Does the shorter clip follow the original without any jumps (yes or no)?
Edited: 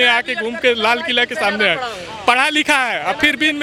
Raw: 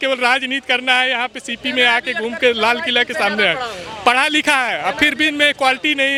yes